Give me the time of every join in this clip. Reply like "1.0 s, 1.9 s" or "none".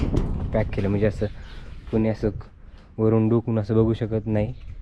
none

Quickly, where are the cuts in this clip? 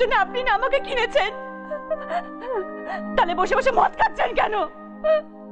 none

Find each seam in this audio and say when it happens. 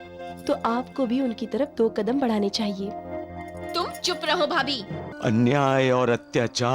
5.1 s

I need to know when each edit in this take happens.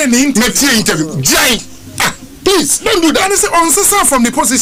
none

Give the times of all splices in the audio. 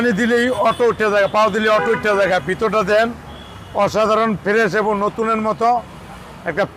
none

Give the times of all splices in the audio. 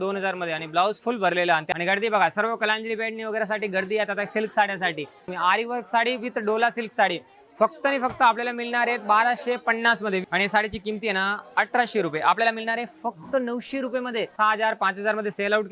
1.7 s, 5.3 s, 10.3 s, 14.3 s

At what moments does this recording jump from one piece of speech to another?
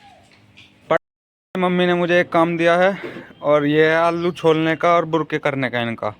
1.0 s

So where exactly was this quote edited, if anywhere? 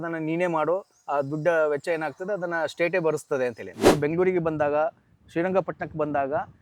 3.9 s

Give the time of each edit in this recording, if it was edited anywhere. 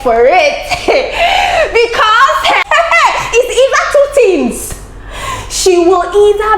2.6 s

